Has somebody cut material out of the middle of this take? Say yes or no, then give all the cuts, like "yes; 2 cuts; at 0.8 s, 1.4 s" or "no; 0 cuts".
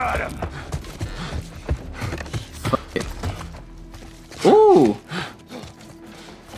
yes; 1 cut; at 0.9 s